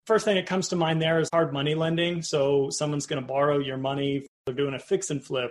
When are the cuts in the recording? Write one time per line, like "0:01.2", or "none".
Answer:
0:01.3
0:04.3